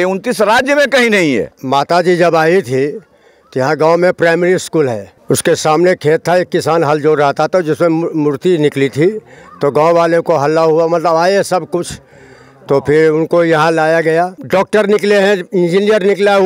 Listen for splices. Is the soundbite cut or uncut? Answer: cut